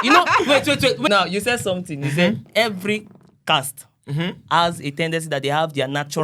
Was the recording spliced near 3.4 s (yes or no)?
no